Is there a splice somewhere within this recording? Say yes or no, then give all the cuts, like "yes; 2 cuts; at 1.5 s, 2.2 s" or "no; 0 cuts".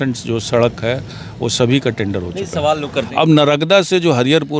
yes; 1 cut; at 3.1 s